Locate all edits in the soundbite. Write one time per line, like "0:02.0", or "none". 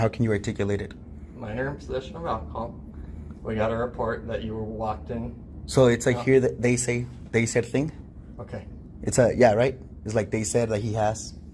none